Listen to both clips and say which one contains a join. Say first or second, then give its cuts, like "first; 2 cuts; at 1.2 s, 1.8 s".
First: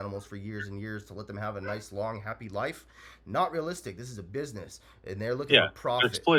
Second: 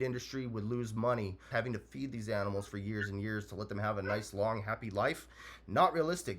second; 1 cut; at 1.4 s